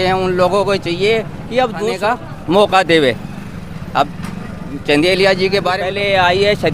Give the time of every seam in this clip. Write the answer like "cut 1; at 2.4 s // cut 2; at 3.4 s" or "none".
cut 1; at 1.9 s // cut 2; at 5.8 s